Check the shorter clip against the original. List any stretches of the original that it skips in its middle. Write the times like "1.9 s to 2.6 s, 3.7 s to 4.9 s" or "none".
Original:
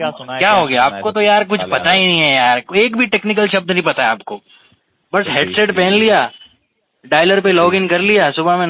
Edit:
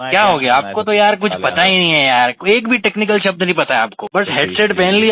4.3 s to 5.0 s